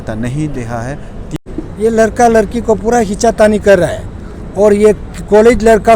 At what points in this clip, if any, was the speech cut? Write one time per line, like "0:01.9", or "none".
0:01.3